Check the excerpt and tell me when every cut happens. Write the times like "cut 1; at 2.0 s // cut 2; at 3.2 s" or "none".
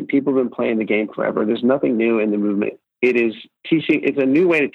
cut 1; at 2.8 s // cut 2; at 3.5 s